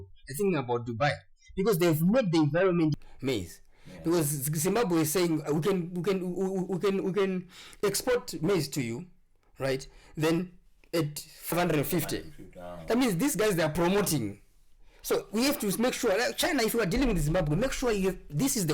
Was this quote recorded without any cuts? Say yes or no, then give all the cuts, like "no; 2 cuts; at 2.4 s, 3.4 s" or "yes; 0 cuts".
no; 2 cuts; at 3.0 s, 11.5 s